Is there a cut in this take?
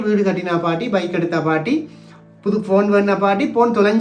no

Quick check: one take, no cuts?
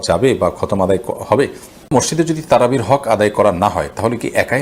no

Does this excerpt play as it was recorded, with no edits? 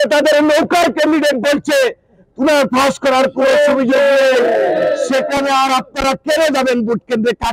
yes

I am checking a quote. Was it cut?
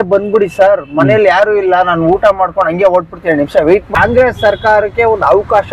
yes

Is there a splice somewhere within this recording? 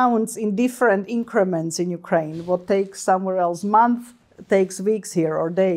no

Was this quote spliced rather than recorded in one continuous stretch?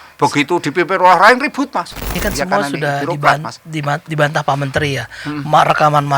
yes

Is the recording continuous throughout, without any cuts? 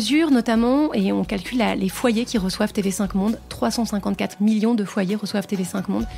yes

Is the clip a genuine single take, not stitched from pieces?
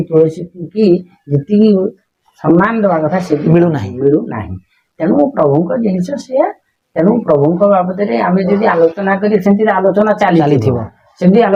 yes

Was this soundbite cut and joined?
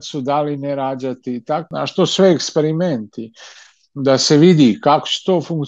yes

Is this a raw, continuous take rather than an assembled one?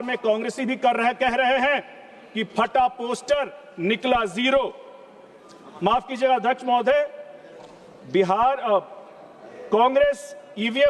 yes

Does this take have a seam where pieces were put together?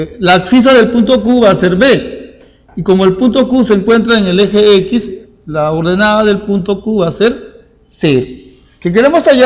no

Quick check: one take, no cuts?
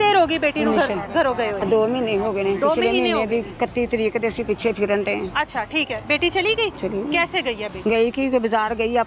no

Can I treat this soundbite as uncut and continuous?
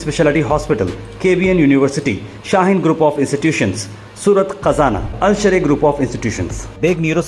yes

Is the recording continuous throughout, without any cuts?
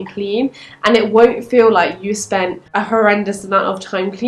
no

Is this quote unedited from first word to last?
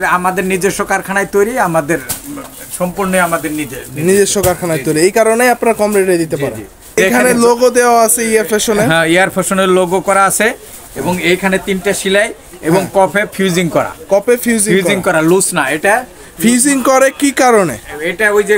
no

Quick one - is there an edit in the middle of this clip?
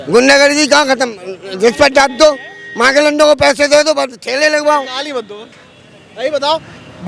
no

